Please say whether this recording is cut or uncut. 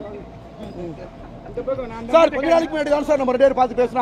uncut